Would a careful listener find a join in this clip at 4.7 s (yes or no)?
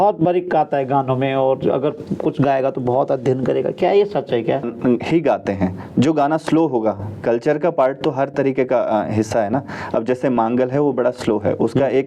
yes